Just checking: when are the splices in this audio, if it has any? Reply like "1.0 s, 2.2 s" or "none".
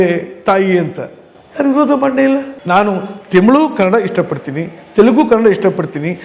2.5 s